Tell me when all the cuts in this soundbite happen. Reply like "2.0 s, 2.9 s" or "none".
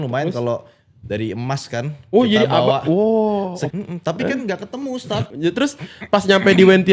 3.6 s, 5.3 s